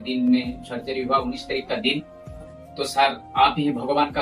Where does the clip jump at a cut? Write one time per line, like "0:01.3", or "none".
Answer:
0:02.5

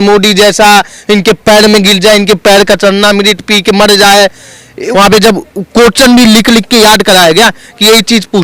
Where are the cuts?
0:04.8

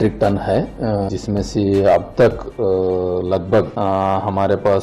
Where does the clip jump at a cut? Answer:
0:01.1
0:03.7

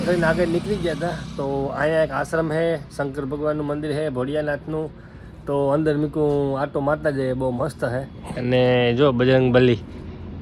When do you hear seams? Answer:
none

